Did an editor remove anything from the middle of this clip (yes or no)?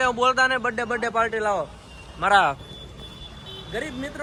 no